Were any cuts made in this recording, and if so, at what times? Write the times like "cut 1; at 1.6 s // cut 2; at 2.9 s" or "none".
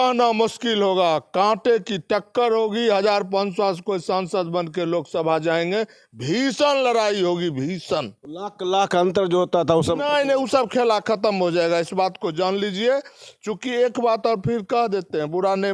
none